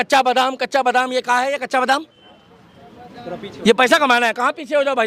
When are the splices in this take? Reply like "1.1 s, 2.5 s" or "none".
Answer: none